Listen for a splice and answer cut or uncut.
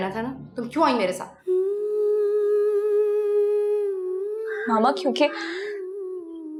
uncut